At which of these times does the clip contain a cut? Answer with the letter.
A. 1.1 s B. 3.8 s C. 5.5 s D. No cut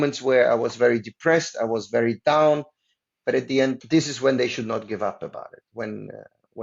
B